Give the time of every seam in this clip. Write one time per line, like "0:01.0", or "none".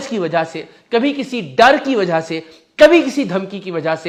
none

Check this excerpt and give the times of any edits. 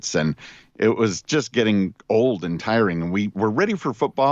0:03.3

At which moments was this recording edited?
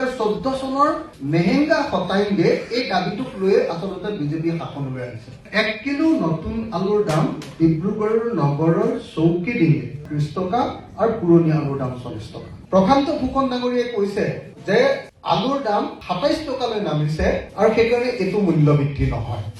0:01.1
0:05.4
0:12.5

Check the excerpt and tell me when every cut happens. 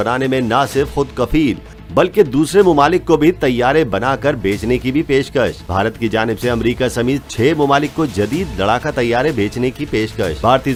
none

